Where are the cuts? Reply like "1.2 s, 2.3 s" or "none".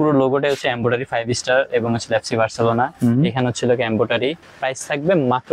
4.5 s